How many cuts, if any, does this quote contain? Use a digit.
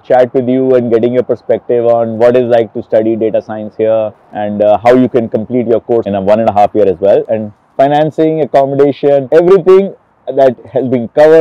0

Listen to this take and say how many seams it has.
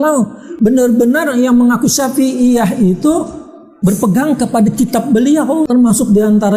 1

